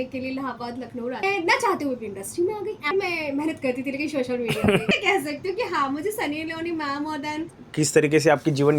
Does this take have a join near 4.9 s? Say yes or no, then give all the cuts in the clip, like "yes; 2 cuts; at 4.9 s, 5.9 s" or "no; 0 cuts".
yes; 4 cuts; at 1.2 s, 2.9 s, 4.9 s, 7.4 s